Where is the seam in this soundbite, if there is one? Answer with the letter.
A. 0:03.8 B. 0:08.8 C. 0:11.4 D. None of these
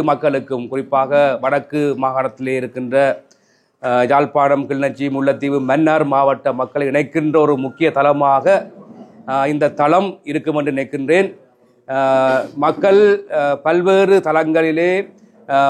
D